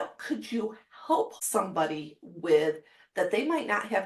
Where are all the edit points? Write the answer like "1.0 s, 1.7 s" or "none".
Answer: 1.4 s